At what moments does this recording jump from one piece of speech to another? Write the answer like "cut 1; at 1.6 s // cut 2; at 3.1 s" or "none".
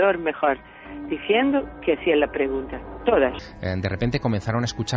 cut 1; at 3.5 s